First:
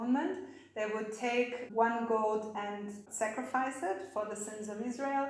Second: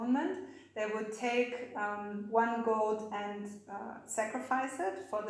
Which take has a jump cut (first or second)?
first